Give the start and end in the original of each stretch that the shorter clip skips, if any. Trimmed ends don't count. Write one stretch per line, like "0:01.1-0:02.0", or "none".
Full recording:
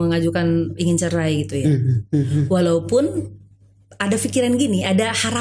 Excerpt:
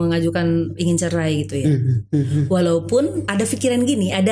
0:03.2-0:03.9

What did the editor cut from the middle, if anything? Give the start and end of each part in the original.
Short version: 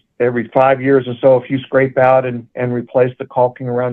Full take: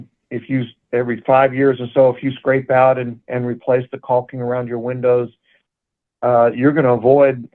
none

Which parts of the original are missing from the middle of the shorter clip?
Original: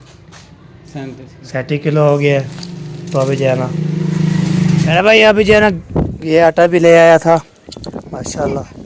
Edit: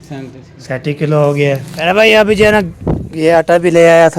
0:02.6-0:04.9

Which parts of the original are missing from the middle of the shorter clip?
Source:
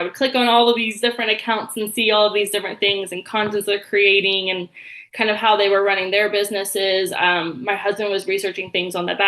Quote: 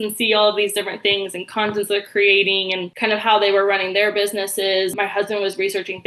0:04.6-0:05.0
0:07.1-0:07.6

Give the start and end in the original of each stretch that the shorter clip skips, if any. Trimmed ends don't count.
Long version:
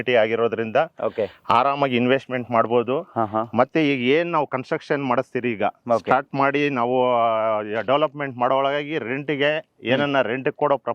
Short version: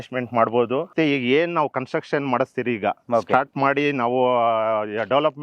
0:03.1-0:03.7

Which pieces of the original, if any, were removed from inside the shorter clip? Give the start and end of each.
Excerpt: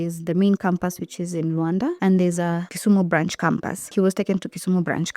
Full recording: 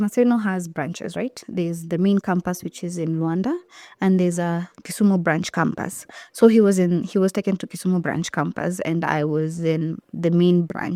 0:03.6-0:04.0
0:04.7-0:04.8
0:06.0-0:07.1

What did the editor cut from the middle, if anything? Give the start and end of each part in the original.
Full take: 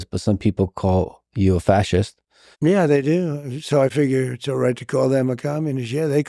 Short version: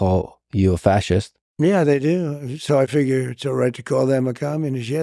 0:02.2-0:02.4

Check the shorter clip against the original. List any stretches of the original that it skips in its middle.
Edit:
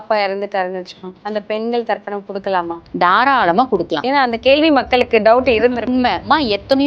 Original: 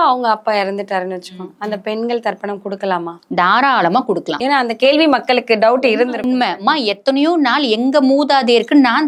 none

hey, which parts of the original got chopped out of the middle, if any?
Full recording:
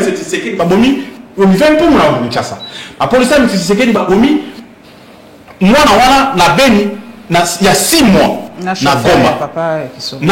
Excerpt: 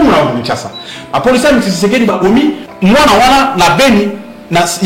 0:04.5-0:05.5

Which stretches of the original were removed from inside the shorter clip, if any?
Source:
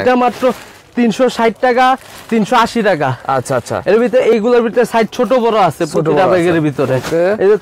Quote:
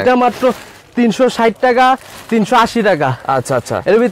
none

